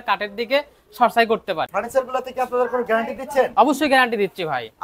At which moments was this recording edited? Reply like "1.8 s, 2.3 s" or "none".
1.7 s